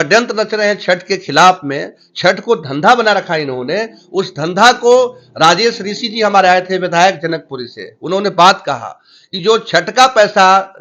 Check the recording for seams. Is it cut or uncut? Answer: uncut